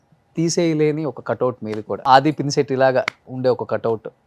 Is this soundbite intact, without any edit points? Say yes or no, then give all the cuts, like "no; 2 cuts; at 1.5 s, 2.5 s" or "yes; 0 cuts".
no; 2 cuts; at 2.0 s, 3.2 s